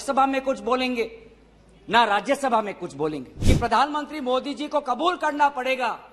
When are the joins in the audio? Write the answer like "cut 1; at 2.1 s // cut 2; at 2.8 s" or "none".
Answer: cut 1; at 3.3 s

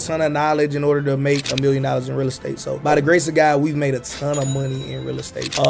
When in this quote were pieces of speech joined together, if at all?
cut 1; at 2.7 s

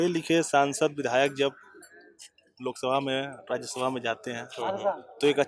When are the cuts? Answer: none

